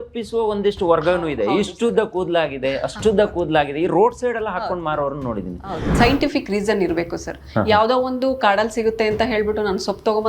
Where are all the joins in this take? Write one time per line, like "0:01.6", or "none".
0:05.9